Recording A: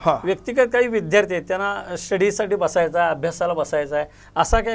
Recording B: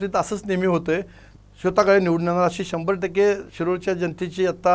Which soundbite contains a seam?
B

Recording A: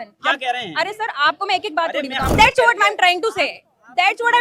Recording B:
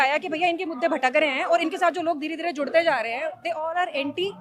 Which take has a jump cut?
A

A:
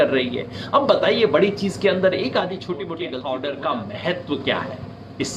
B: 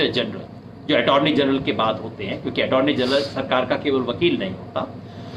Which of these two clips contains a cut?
A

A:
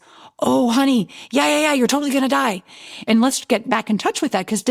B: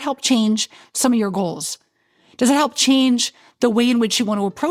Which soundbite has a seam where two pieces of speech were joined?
A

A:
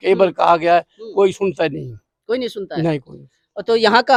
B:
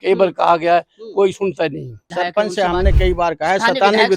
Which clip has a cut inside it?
B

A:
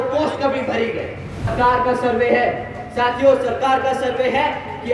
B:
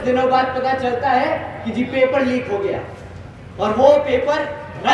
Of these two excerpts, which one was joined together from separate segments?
A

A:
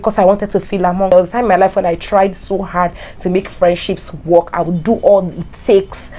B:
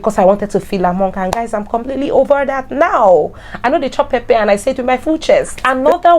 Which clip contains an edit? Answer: A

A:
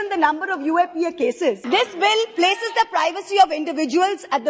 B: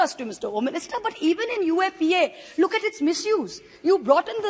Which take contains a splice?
A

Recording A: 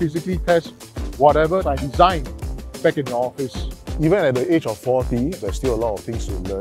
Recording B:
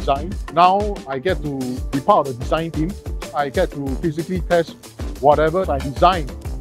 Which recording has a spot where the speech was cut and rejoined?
A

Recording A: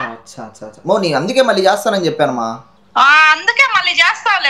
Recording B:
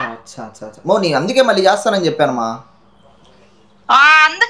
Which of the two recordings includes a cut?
A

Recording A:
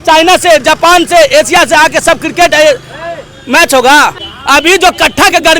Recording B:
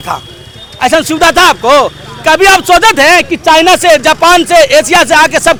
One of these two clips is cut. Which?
A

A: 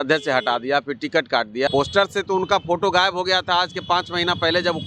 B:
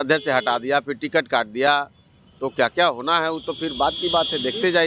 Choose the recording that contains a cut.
A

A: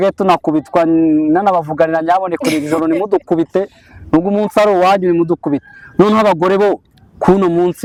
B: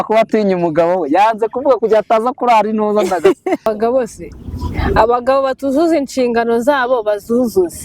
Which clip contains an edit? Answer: B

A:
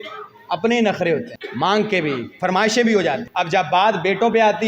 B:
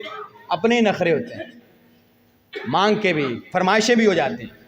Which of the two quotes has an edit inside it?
A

